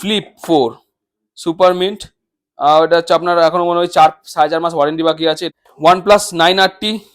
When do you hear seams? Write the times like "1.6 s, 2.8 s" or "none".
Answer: 5.5 s